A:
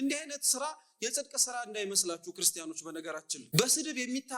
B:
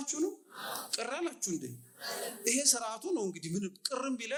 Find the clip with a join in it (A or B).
A